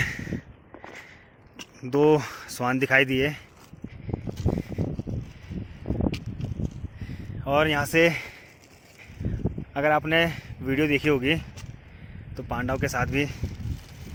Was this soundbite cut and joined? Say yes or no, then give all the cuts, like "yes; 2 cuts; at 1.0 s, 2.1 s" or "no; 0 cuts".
no; 0 cuts